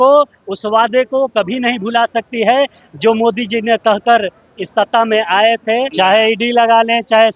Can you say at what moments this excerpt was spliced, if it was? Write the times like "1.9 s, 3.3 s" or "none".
5.9 s